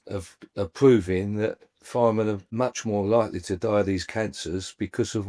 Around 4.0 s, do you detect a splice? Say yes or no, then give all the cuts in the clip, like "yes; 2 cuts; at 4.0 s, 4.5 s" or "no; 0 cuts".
no; 1 cut; at 2.5 s